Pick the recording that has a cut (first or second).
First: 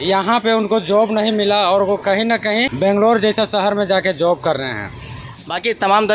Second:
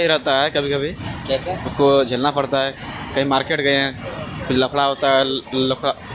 first